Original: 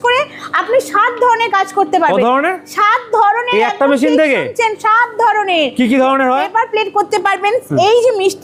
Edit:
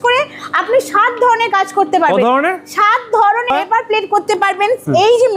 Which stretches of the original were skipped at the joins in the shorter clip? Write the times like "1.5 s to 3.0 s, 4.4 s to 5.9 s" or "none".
3.5 s to 6.3 s